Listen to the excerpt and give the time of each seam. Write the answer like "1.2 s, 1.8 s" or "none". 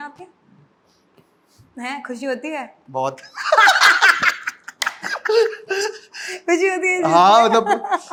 none